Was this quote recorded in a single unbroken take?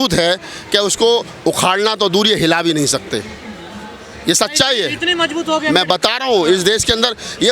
yes; 0 cuts

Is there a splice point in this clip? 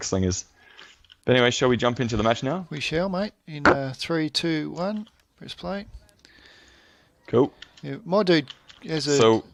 no; 0 cuts

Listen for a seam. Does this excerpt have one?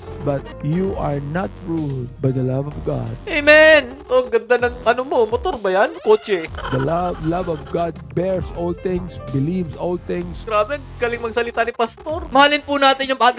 yes; 4 cuts; at 4.0 s, 6.5 s, 10.4 s, 12.3 s

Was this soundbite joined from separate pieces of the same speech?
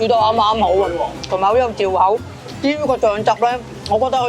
no; 0 cuts

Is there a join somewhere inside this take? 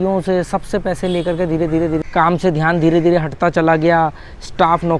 yes; 1 cut; at 2.0 s

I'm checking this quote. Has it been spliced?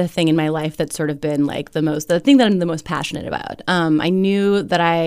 no; 0 cuts

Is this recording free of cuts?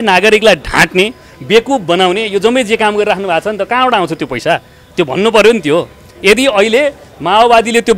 yes; 0 cuts

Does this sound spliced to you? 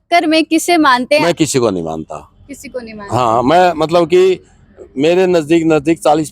yes; 1 cut; at 1.2 s

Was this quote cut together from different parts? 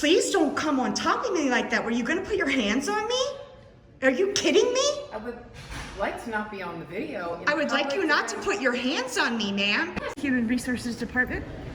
yes; 1 cut; at 10.2 s

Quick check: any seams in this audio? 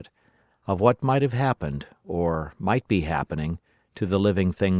no; 0 cuts

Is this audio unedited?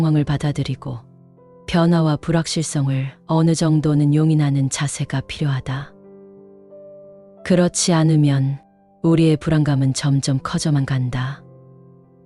no; 1 cut; at 11.4 s

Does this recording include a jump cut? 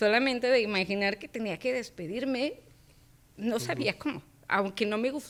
no; 0 cuts

